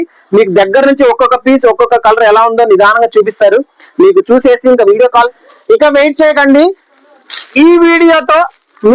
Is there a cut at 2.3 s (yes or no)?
no